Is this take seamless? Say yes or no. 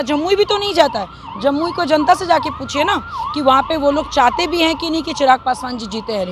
yes